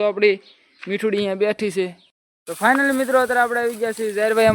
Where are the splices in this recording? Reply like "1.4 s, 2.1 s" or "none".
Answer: 2.0 s